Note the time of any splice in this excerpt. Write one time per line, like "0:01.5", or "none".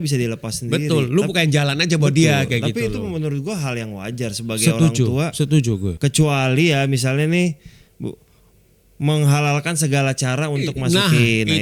0:05.9